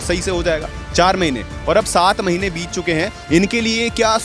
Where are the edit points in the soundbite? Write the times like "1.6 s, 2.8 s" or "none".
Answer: 3.2 s